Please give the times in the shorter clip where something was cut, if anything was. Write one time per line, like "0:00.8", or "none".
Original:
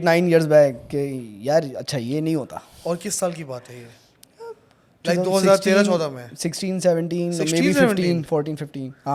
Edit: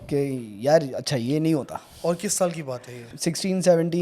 0:03.1